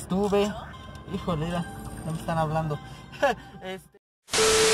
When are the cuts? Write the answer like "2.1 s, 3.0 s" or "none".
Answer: 3.7 s